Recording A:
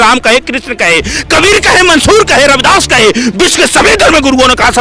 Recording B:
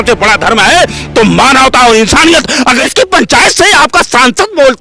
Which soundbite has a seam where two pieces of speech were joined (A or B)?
B